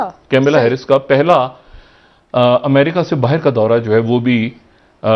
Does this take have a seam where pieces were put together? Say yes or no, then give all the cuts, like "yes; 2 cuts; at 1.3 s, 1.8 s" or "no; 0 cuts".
no; 0 cuts